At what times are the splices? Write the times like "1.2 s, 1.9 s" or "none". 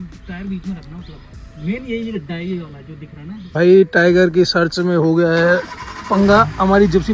3.6 s

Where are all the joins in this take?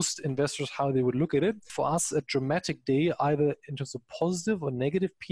1.7 s

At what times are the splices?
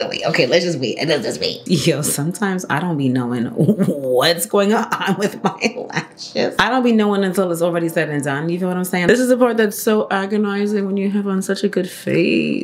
1.6 s, 9.1 s

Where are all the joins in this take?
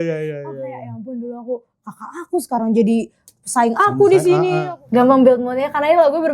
4.7 s

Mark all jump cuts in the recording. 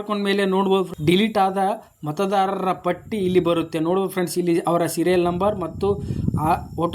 0.9 s

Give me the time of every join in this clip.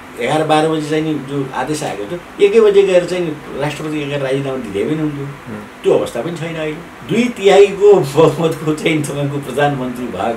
6.9 s

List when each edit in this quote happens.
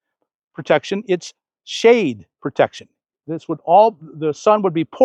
none

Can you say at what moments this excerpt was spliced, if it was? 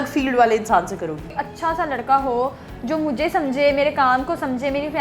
1.4 s

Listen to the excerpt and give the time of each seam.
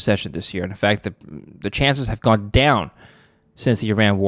none

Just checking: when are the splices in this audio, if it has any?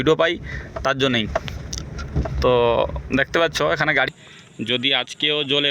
4.1 s

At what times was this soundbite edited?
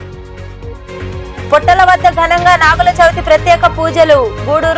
none

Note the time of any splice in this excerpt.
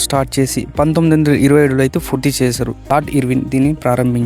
2.9 s

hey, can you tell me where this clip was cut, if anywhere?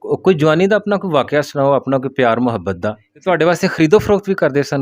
3.1 s

